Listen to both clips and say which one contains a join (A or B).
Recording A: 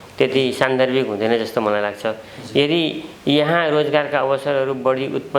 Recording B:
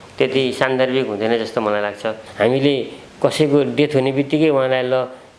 B